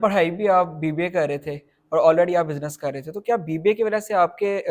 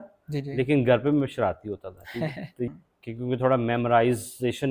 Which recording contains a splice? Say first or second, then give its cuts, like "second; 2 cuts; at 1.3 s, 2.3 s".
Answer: second; 1 cut; at 2.7 s